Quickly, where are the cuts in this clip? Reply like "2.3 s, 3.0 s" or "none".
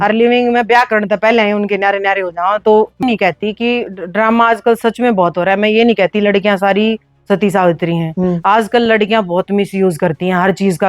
3.0 s